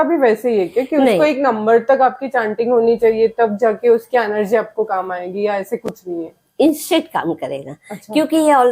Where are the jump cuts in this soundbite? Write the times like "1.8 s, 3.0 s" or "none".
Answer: none